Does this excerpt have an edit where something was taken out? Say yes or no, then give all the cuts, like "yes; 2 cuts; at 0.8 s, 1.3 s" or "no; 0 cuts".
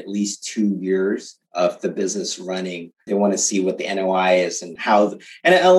yes; 3 cuts; at 1.4 s, 3.0 s, 4.7 s